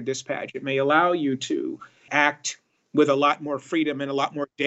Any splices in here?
yes; 1 cut; at 2.1 s

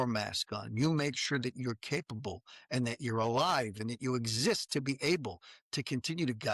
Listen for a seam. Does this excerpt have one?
no; 0 cuts

